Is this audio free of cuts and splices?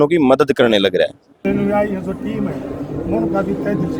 no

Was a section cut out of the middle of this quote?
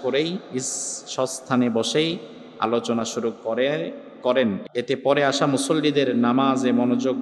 yes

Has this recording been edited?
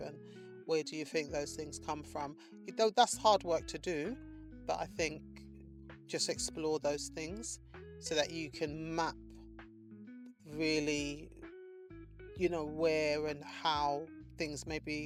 no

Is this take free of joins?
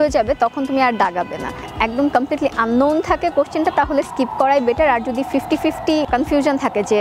no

